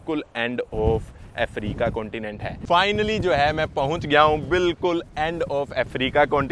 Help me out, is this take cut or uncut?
cut